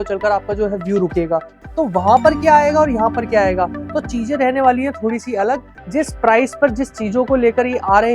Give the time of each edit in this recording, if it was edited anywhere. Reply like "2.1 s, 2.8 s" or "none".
1.6 s, 5.7 s